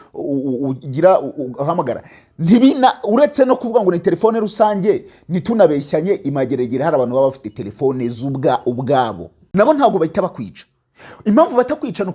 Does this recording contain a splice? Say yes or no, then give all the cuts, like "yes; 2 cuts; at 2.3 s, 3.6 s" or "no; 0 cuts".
yes; 1 cut; at 9.4 s